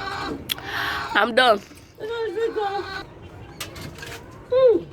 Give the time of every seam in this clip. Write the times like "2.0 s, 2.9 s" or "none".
3.0 s